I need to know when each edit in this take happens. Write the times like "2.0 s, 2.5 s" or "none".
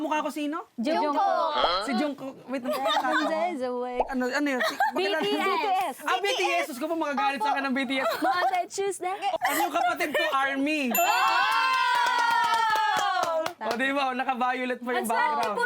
9.4 s